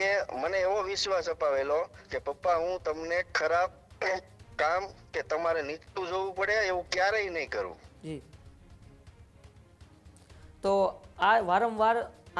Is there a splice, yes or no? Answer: no